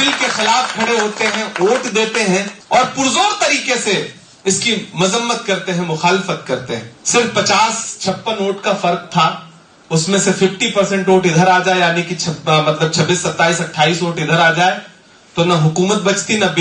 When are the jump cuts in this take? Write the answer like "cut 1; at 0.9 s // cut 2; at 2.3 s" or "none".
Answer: cut 1; at 2.6 s // cut 2; at 6.9 s